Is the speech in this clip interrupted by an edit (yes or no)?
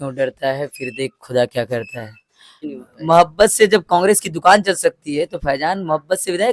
yes